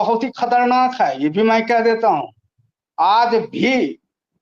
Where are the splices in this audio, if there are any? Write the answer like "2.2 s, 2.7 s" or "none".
none